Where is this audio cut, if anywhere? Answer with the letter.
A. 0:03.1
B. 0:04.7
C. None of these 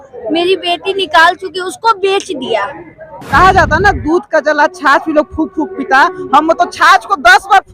A